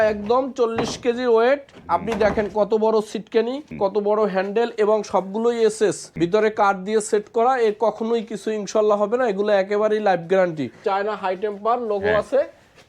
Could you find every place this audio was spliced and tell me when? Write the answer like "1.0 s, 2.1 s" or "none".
3.6 s, 6.0 s, 10.8 s